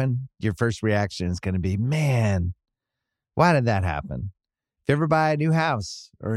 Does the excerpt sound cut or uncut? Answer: uncut